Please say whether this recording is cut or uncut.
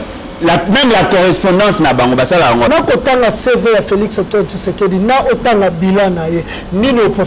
cut